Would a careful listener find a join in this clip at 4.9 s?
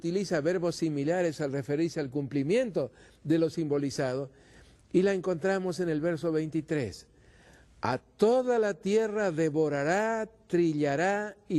no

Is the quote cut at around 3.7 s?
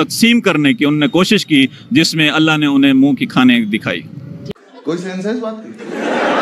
no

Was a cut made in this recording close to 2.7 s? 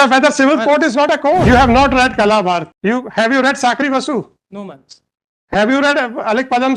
yes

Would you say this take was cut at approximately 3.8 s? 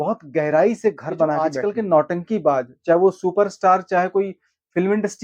no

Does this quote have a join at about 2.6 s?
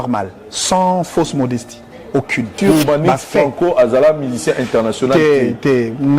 yes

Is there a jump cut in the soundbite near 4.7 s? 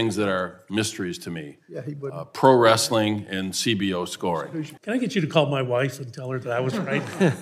yes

